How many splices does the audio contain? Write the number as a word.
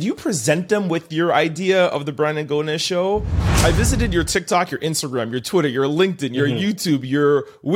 one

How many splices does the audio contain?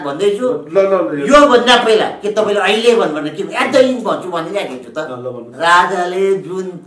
one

